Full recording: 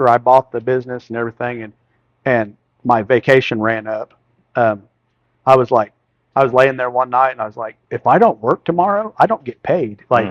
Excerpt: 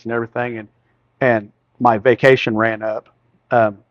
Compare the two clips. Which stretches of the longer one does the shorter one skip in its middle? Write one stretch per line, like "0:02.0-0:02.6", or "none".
none